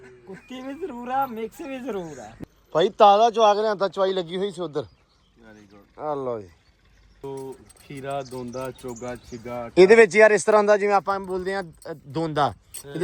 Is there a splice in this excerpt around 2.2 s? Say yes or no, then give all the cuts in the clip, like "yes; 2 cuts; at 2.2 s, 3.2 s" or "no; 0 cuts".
yes; 2 cuts; at 2.2 s, 7.2 s